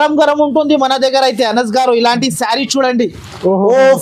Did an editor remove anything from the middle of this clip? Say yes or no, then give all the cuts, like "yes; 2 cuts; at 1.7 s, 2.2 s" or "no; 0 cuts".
no; 0 cuts